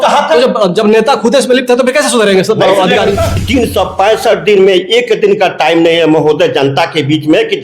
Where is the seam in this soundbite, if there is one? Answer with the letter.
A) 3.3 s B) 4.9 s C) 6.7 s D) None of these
A